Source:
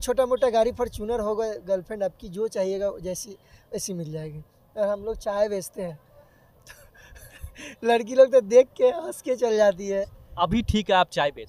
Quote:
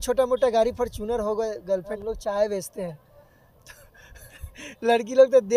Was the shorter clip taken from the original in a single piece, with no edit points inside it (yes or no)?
no